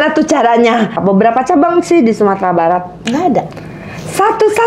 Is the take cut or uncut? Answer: cut